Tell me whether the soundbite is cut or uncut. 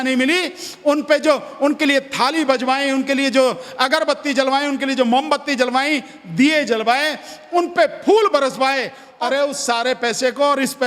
cut